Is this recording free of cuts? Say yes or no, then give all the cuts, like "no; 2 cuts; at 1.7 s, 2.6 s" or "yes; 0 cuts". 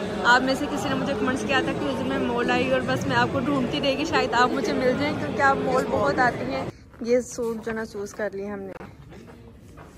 no; 1 cut; at 6.8 s